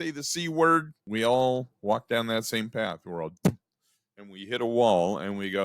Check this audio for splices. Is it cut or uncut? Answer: cut